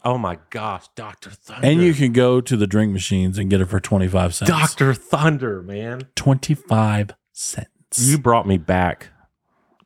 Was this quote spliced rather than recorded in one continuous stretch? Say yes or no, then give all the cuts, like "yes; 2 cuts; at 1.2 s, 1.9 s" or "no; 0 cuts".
no; 0 cuts